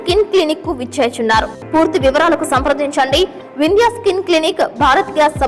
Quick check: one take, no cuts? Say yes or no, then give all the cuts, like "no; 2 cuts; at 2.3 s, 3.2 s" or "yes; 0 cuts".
no; 1 cut; at 1.6 s